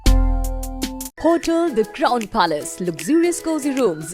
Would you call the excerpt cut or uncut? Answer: cut